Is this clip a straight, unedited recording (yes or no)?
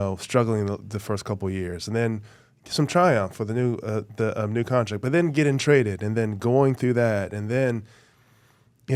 yes